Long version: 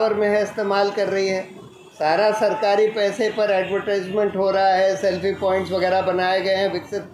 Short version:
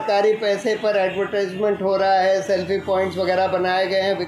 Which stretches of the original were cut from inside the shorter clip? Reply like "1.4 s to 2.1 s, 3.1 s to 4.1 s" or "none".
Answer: none